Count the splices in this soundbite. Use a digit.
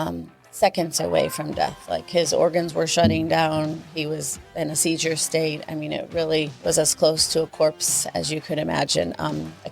1